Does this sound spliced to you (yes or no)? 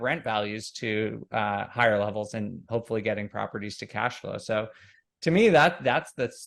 no